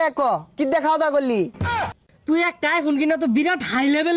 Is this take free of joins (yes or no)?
no